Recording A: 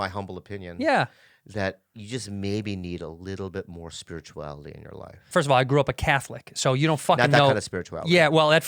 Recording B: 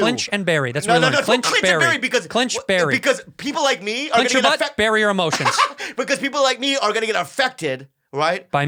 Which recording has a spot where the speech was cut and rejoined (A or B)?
A